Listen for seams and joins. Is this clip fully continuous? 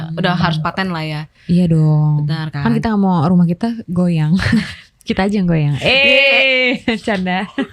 yes; 0 cuts

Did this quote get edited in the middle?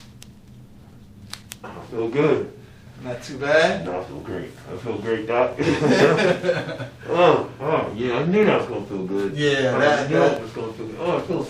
yes; 1 cut; at 1.8 s

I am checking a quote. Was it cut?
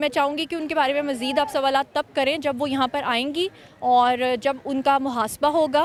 no; 0 cuts

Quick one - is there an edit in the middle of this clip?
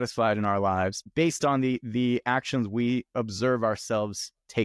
yes; 1 cut; at 1.0 s

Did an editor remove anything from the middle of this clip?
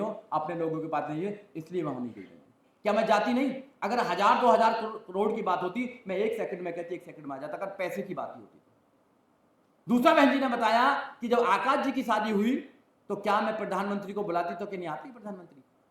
no; 0 cuts

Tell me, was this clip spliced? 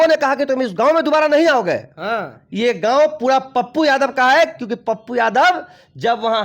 no; 0 cuts

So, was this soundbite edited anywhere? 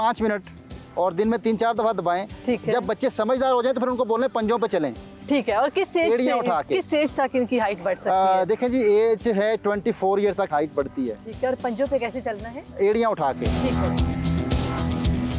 no; 0 cuts

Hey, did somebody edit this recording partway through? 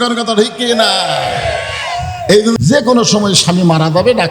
yes; 1 cut; at 2.6 s

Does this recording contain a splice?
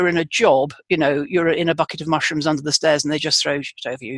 no; 0 cuts

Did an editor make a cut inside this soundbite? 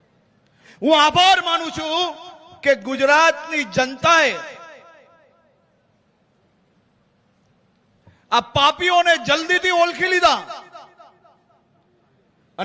no; 0 cuts

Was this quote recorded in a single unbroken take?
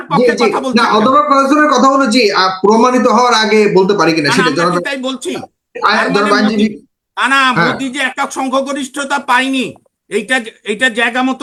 yes; 0 cuts

